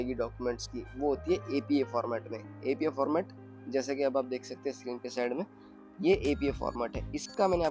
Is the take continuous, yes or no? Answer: yes